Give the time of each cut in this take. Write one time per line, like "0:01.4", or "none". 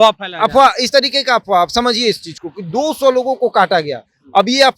none